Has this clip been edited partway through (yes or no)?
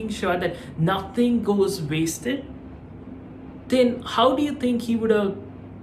no